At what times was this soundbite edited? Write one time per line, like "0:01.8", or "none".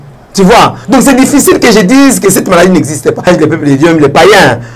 0:03.2